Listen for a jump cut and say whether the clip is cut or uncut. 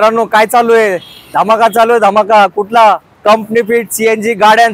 uncut